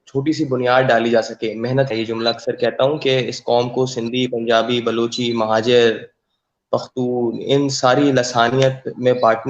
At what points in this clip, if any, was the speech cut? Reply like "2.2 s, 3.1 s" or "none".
1.9 s